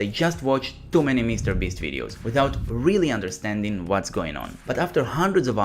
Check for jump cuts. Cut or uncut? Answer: cut